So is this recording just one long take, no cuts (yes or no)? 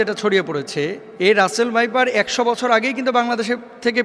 no